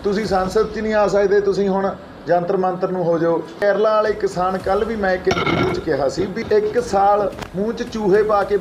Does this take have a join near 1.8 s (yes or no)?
no